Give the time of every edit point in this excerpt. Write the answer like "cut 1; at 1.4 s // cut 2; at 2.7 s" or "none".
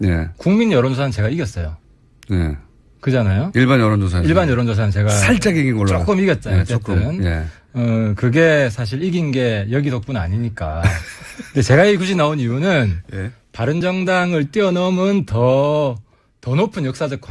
cut 1; at 8.2 s